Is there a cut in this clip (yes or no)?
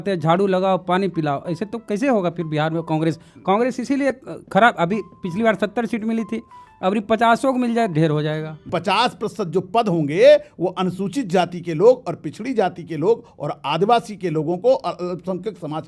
yes